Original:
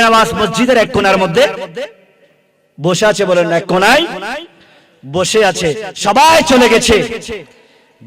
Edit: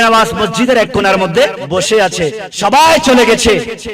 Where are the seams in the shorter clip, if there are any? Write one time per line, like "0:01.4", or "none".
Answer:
0:01.6